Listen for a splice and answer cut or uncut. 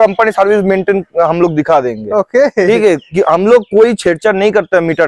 uncut